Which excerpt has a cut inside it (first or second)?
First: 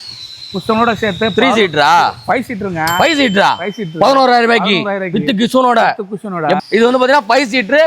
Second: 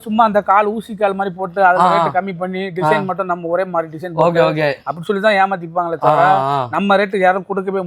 first